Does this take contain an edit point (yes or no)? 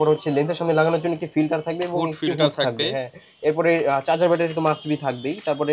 no